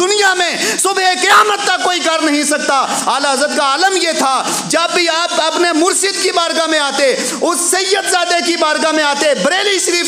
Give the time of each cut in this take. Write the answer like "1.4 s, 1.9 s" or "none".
none

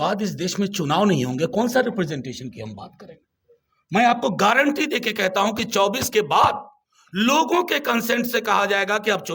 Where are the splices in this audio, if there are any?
none

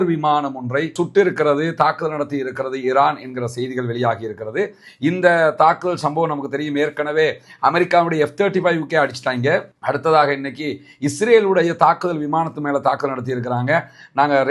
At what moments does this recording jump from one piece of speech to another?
none

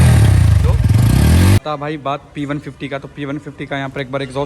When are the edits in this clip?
1.6 s

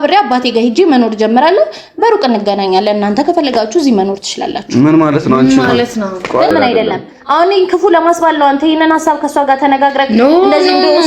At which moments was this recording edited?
6.5 s

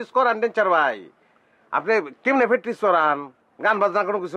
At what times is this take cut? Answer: none

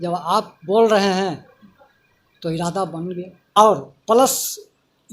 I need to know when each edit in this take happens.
3.6 s

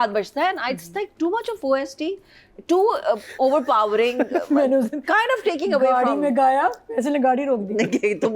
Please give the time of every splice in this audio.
none

